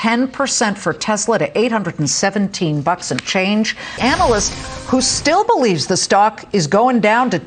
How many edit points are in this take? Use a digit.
1